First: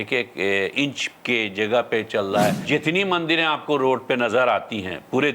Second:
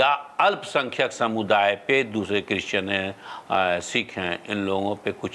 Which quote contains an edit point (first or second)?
first